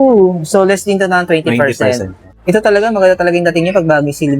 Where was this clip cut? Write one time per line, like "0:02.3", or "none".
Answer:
0:02.2